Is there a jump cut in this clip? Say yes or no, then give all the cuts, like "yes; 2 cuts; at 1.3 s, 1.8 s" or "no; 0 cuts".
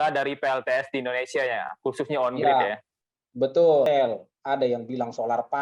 yes; 1 cut; at 3.9 s